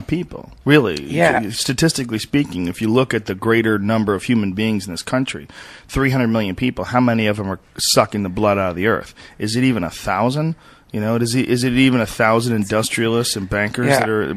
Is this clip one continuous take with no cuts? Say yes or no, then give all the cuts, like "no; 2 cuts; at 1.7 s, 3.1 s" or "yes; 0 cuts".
yes; 0 cuts